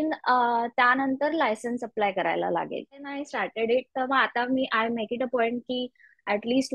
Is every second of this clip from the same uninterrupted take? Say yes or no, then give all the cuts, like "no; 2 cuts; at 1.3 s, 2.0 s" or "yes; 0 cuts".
no; 1 cut; at 3.2 s